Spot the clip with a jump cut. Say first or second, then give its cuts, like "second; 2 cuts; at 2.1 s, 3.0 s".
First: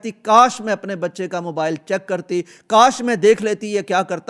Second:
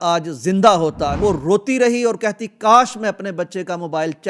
second; 1 cut; at 1.2 s